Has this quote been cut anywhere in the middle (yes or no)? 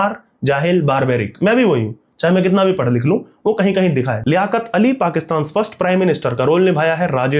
no